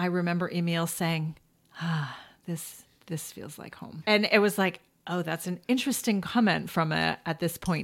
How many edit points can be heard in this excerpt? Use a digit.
1